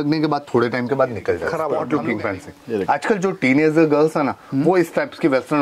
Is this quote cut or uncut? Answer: cut